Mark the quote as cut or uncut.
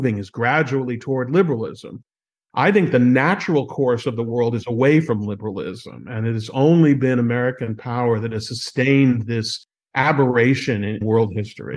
uncut